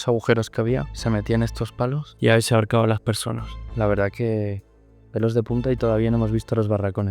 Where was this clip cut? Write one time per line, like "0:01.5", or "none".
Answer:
0:00.9
0:02.1
0:03.7